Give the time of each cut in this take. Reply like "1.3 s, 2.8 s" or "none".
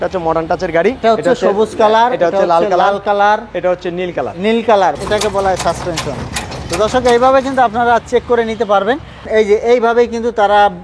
1.0 s, 5.0 s, 9.3 s